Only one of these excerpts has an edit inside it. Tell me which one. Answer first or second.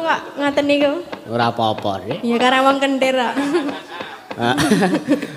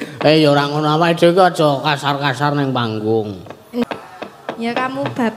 second